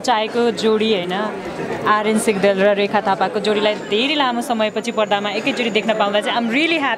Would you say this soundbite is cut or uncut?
uncut